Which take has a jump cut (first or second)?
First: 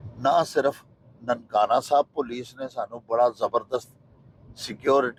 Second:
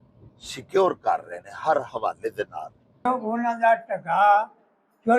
second